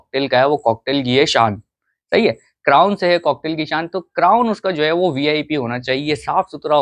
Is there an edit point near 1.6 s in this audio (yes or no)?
no